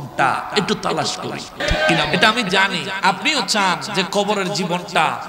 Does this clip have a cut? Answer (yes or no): yes